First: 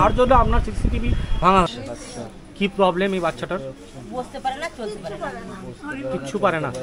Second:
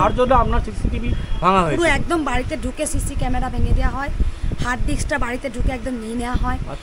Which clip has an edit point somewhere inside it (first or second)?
first